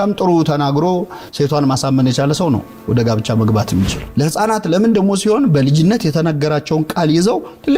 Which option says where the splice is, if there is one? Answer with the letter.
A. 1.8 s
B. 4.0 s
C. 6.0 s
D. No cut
B